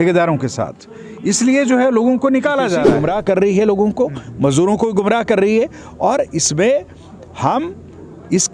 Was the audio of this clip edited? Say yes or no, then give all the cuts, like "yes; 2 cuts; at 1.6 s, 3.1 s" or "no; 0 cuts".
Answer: yes; 1 cut; at 2.9 s